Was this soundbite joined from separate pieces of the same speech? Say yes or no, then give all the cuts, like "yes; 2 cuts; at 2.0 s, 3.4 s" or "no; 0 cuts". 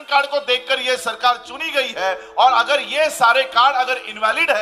no; 0 cuts